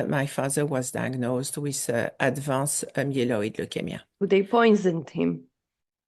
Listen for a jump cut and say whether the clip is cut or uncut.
cut